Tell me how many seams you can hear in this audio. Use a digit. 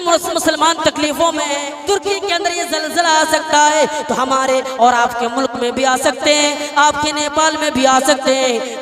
1